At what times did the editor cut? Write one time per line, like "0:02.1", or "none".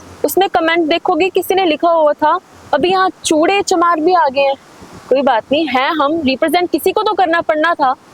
none